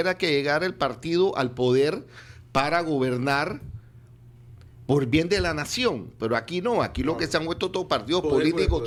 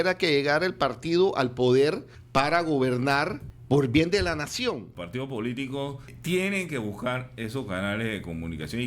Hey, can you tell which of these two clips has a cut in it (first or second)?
second